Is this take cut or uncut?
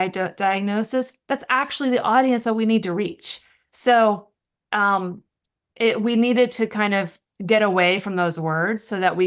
uncut